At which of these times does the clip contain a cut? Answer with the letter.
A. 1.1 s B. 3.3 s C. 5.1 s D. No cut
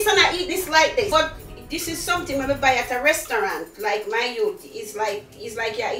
A